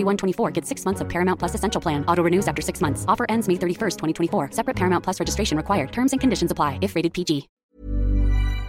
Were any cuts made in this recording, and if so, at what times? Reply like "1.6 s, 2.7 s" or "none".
7.6 s